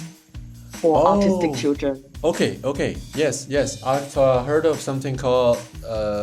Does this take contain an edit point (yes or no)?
no